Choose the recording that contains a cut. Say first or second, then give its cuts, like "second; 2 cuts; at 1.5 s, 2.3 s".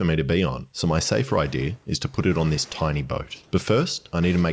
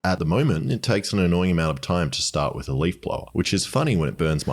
second; 1 cut; at 1.0 s